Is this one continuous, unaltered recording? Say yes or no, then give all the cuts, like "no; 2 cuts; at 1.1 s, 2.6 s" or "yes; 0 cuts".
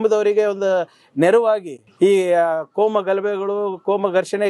no; 1 cut; at 1.8 s